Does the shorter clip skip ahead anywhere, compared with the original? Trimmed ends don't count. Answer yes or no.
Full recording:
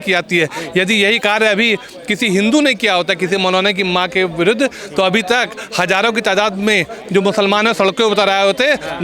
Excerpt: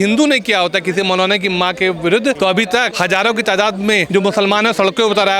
yes